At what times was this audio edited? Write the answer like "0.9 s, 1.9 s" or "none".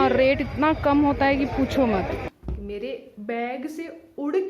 2.2 s